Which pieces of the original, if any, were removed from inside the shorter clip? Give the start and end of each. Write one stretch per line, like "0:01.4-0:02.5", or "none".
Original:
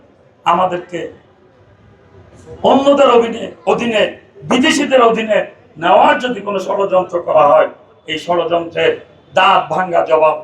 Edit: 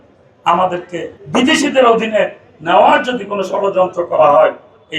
0:01.1-0:04.3